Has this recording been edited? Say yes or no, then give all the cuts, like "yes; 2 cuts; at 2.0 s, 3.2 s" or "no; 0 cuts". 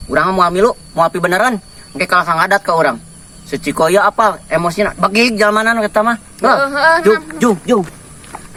no; 0 cuts